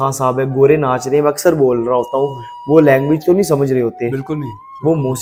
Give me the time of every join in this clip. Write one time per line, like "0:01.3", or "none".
none